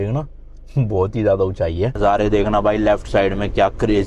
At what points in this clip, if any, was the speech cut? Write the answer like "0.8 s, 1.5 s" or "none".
1.9 s